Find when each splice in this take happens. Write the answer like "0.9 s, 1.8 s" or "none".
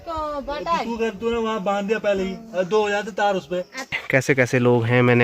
3.9 s